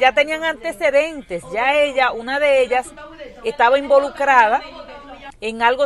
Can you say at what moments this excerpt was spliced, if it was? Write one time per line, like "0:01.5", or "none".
none